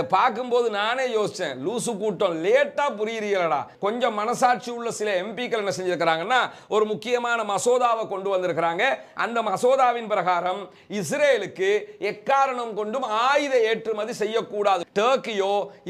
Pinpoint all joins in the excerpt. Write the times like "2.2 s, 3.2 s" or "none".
3.7 s, 14.9 s